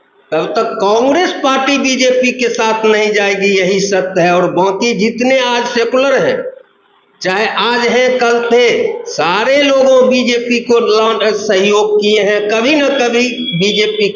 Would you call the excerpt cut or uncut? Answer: uncut